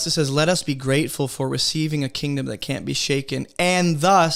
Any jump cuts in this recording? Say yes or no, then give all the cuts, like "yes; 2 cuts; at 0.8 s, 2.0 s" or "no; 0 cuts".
no; 0 cuts